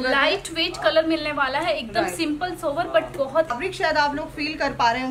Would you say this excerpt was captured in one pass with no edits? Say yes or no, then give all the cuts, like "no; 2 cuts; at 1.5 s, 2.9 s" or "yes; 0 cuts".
no; 1 cut; at 3.5 s